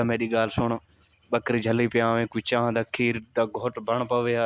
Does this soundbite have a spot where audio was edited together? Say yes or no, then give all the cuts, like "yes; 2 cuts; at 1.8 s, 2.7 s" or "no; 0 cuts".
no; 0 cuts